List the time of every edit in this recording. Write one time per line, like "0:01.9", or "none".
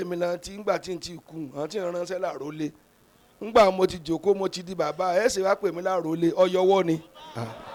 none